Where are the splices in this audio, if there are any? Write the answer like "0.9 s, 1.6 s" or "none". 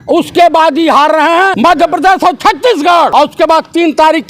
1.5 s, 3.1 s